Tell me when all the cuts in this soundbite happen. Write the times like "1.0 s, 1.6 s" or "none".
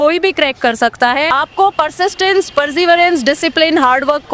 1.3 s